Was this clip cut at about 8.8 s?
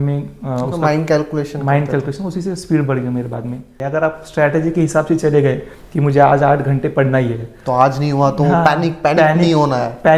no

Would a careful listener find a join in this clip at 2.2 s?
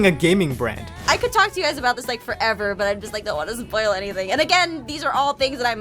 no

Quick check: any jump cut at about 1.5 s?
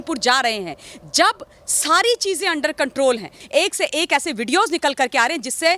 no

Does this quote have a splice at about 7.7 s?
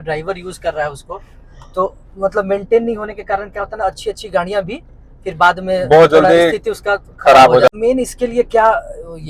yes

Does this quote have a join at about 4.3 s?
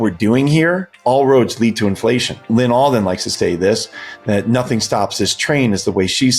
no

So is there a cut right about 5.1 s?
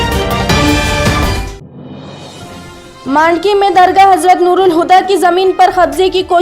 no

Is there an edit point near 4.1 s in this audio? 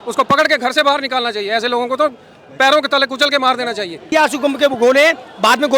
yes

